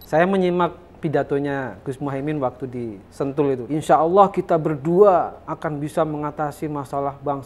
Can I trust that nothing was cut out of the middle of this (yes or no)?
no